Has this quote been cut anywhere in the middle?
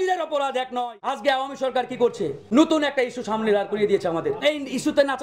yes; 3 cuts; at 1.2 s, 2.4 s, 4.4 s

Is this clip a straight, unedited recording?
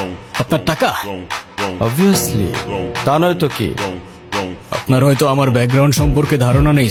yes; 0 cuts

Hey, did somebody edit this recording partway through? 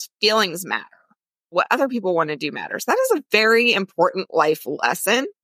no; 0 cuts

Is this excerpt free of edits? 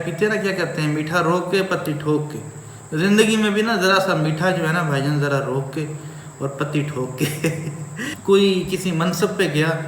no; 1 cut; at 8.1 s

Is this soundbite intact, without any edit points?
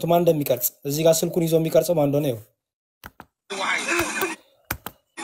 yes; 0 cuts

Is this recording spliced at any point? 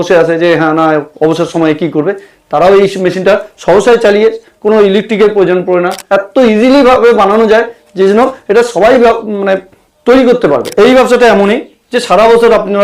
yes; 2 cuts; at 6.0 s, 10.7 s

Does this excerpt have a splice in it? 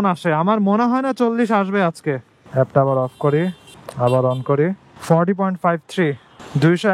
yes; 1 cut; at 2.4 s

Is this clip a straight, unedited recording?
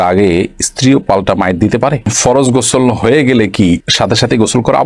no; 1 cut; at 2.1 s

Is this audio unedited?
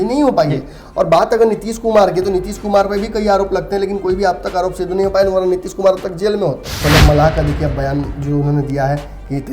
no; 1 cut; at 6.7 s

